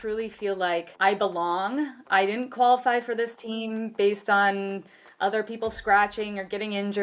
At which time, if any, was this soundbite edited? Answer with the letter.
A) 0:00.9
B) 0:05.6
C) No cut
A